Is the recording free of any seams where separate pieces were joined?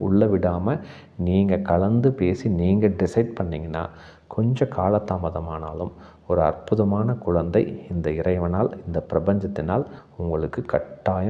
yes; 0 cuts

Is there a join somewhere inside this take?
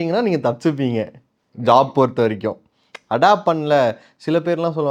no; 0 cuts

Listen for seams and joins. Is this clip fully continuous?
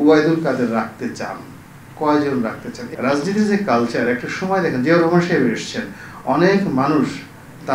no; 1 cut; at 2.8 s

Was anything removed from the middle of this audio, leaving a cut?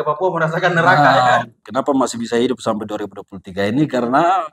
yes; 1 cut; at 1.6 s

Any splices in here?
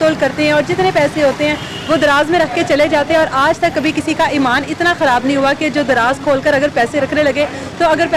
no; 0 cuts

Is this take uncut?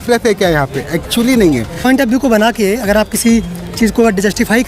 no; 1 cut; at 1.8 s

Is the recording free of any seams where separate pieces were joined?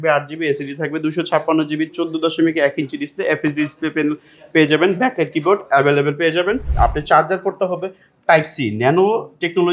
no; 1 cut; at 6.7 s

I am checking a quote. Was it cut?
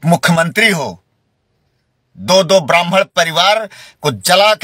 no; 0 cuts

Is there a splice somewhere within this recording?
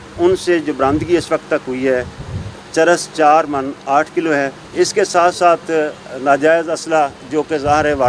yes; 1 cut; at 4.6 s

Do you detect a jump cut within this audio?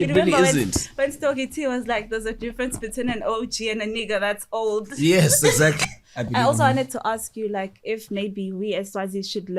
yes; 1 cut; at 5.9 s

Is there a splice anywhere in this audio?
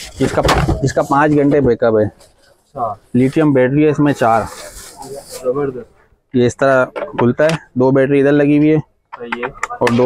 no; 0 cuts

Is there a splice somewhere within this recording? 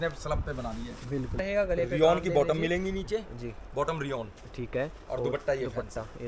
yes; 1 cut; at 1.4 s

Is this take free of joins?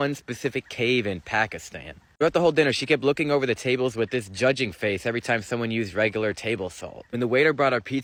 yes; 0 cuts

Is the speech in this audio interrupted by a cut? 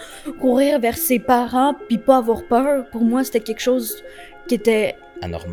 no; 0 cuts

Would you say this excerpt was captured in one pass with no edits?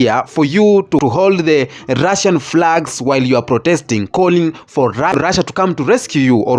no; 2 cuts; at 1.0 s, 5.3 s

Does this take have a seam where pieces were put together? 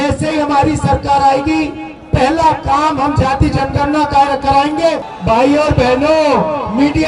yes; 1 cut; at 5.1 s

